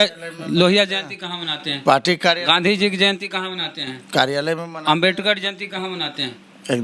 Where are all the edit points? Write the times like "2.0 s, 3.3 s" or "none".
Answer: none